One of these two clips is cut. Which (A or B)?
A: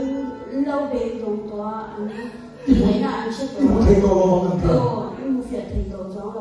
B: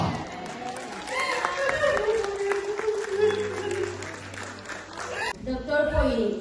B